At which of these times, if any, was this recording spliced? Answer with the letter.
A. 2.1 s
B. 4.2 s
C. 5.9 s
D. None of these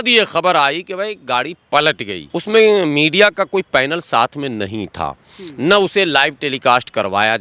A